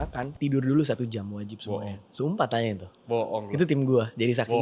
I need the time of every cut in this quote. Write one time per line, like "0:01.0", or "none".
none